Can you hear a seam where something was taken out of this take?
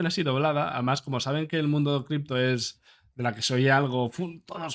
no; 0 cuts

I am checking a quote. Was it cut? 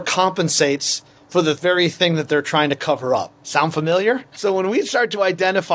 yes; 2 cuts; at 3.4 s, 4.3 s

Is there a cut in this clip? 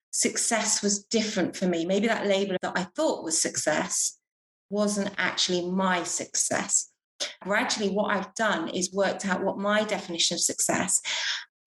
yes; 2 cuts; at 2.6 s, 7.4 s

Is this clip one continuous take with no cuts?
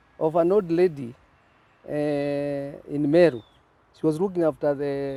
yes; 0 cuts

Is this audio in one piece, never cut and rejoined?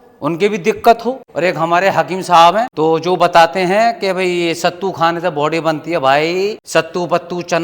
no; 3 cuts; at 1.3 s, 2.7 s, 6.6 s

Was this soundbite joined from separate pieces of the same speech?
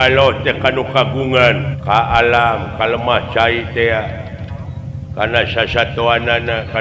yes; 1 cut; at 1.7 s

